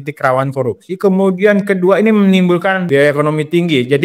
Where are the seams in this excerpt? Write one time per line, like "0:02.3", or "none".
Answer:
0:02.8